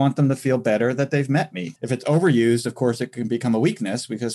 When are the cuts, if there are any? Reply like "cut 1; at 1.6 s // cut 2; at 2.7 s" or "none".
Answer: cut 1; at 1.6 s